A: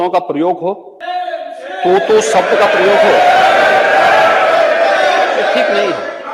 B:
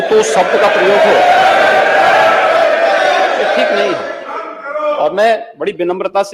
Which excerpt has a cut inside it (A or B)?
A